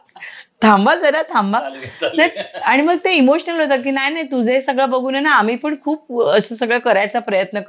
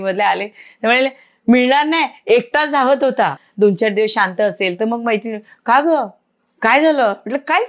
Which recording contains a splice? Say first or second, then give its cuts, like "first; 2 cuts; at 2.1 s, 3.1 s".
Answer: second; 1 cut; at 3.4 s